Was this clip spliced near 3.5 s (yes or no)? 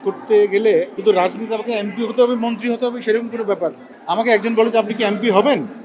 no